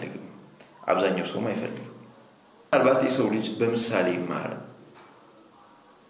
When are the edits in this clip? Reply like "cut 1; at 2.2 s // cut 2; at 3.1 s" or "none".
cut 1; at 2.7 s